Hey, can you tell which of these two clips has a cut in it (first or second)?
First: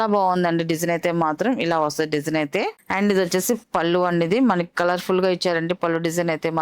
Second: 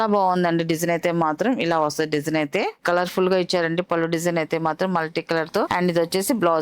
second